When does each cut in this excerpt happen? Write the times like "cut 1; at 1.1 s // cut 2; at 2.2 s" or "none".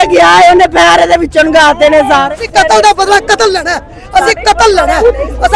cut 1; at 2.3 s

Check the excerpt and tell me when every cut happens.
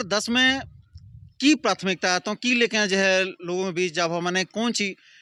none

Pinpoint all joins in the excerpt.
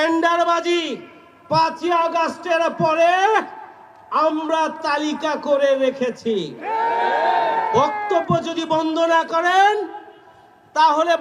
none

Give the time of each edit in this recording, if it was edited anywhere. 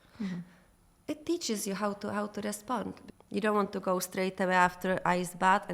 cut 1; at 3.0 s

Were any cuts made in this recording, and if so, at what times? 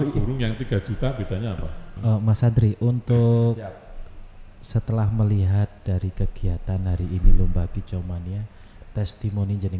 cut 1; at 1.9 s

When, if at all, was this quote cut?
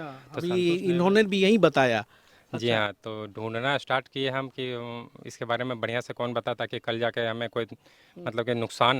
none

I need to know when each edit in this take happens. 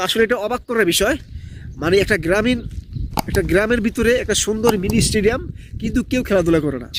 none

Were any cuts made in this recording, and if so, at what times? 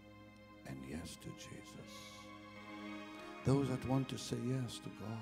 cut 1; at 3.2 s

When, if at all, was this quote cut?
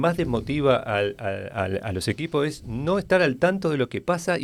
none

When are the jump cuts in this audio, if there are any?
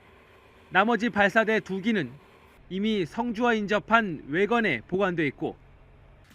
cut 1; at 4.2 s

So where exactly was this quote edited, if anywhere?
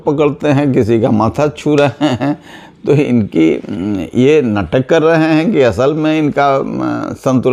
none

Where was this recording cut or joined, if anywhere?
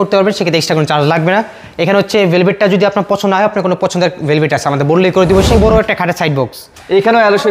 cut 1; at 5.5 s

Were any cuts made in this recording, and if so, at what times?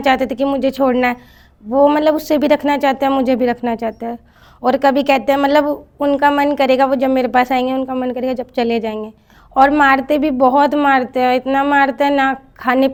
none

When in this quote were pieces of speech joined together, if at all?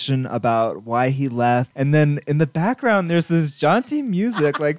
cut 1; at 1.7 s

